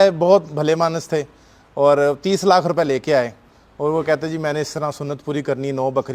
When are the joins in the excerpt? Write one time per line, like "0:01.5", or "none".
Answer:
none